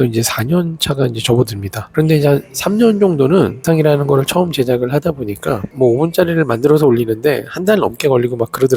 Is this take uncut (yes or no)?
no